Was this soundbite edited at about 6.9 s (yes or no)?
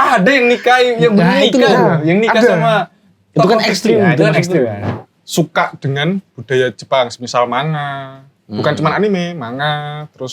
no